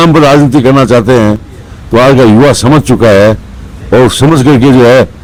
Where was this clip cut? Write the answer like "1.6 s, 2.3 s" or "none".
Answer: none